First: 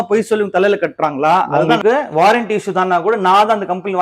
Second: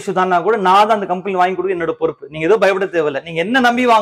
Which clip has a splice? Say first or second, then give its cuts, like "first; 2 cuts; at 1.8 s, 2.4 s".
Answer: first; 1 cut; at 1.5 s